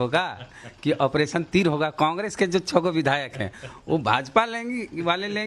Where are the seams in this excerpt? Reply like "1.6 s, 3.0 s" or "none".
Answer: none